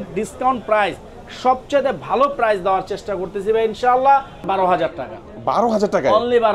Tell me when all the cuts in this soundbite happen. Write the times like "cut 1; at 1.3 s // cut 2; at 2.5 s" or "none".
cut 1; at 4.5 s